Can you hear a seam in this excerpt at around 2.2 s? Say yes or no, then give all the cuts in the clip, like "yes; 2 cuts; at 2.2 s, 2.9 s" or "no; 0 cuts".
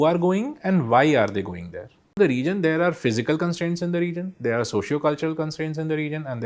yes; 1 cut; at 2.2 s